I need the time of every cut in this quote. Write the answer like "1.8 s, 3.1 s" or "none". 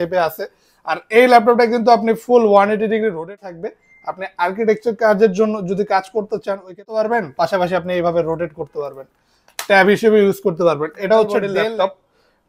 3.4 s, 6.8 s, 11.5 s